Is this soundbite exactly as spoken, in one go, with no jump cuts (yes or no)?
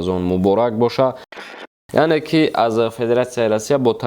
no